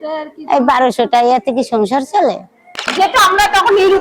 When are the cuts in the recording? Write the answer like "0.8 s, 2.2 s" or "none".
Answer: 2.9 s